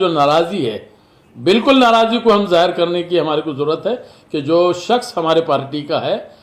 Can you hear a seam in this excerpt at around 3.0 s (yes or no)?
no